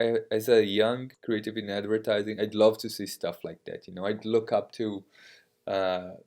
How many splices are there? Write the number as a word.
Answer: one